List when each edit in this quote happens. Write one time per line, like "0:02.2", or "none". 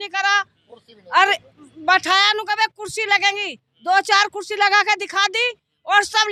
none